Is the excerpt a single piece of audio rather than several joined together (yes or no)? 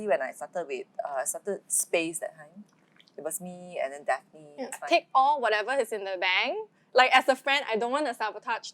no